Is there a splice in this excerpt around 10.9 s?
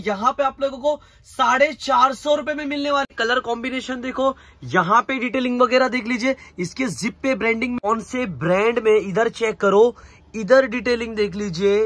no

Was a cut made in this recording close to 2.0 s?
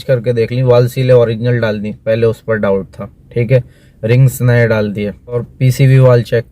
no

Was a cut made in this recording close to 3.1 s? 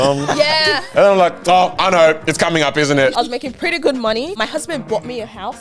yes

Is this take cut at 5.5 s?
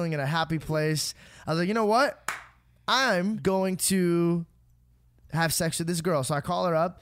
no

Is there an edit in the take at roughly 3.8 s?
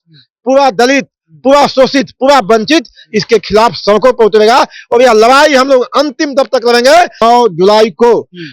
no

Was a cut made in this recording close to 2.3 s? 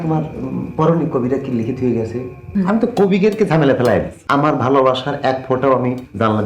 yes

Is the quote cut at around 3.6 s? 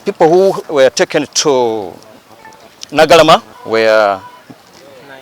yes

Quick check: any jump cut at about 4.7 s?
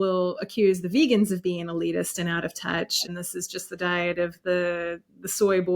no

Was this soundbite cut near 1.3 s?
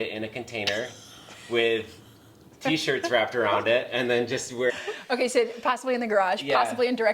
no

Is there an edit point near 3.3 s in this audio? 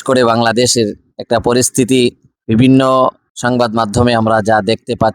yes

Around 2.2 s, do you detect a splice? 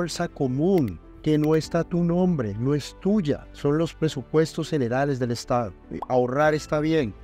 no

